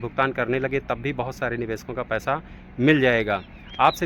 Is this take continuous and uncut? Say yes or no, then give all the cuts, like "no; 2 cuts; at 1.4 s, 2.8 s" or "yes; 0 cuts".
yes; 0 cuts